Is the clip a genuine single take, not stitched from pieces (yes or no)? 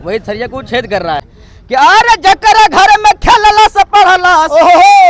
no